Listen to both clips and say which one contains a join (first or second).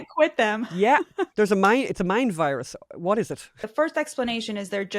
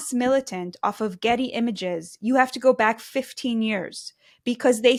first